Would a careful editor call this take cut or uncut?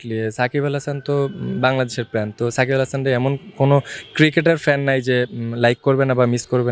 uncut